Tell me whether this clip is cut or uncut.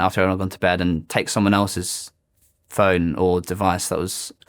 uncut